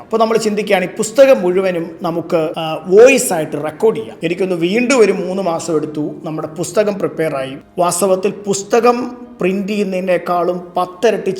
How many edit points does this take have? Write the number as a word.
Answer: three